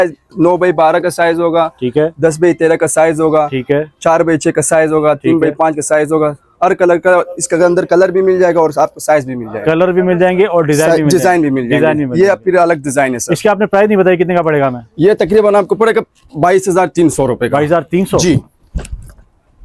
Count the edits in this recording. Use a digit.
0